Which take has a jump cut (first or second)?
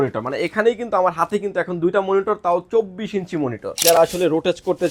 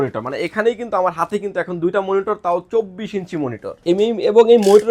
first